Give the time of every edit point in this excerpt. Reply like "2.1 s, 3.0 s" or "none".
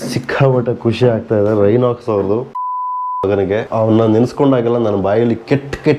2.5 s